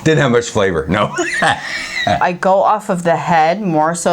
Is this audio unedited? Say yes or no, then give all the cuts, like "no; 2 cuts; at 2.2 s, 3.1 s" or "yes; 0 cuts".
no; 1 cut; at 2.2 s